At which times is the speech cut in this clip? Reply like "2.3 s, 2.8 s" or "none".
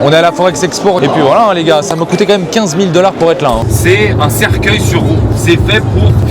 1.0 s, 3.6 s